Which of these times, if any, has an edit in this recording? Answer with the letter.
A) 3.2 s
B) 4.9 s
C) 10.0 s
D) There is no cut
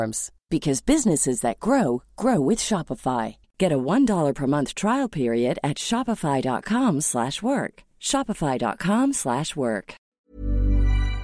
C